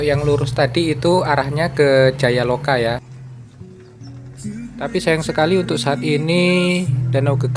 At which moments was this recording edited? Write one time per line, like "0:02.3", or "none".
0:03.1